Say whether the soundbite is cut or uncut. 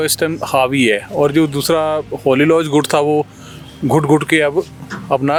uncut